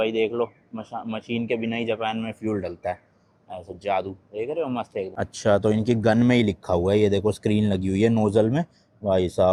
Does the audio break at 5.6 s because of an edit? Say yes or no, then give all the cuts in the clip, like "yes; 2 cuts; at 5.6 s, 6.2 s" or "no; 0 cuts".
no; 0 cuts